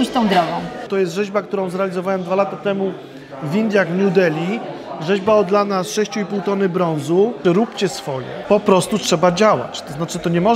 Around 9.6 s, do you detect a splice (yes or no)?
no